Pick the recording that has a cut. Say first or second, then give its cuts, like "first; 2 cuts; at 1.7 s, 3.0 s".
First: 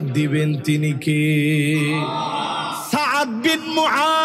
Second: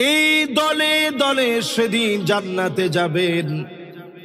first; 1 cut; at 2.8 s